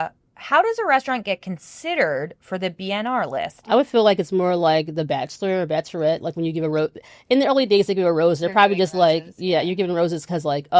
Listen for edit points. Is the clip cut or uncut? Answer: cut